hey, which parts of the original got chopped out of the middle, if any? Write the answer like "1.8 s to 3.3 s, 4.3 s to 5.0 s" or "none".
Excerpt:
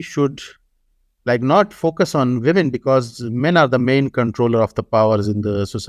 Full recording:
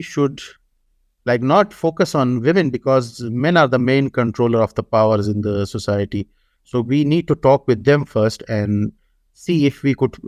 none